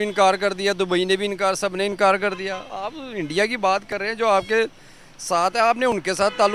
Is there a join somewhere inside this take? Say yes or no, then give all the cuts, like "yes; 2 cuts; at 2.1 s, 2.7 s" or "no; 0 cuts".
no; 0 cuts